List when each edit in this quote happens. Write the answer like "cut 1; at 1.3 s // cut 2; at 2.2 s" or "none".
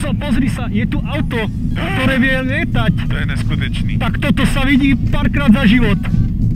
none